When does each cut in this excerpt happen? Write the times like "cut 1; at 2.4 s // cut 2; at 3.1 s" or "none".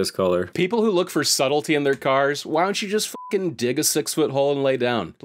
none